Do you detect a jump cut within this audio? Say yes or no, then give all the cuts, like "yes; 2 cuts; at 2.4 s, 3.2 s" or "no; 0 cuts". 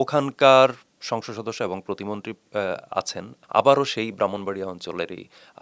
yes; 1 cut; at 3.3 s